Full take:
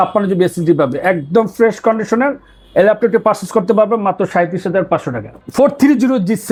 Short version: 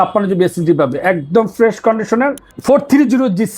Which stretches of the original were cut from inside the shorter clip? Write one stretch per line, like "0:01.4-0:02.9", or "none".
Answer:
0:02.5-0:05.4